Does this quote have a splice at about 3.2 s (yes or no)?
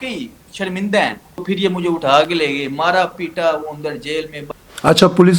no